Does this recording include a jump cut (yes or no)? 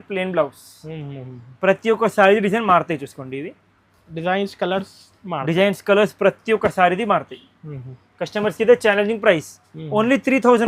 no